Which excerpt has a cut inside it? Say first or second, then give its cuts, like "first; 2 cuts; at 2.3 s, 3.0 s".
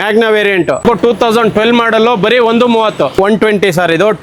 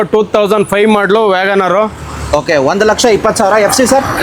first; 2 cuts; at 0.8 s, 3.2 s